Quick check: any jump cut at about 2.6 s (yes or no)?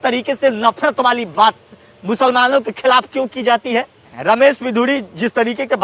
no